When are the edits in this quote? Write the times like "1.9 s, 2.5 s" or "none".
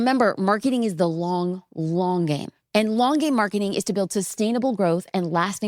2.5 s